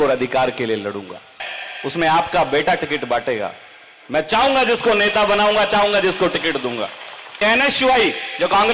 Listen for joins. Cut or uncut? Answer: cut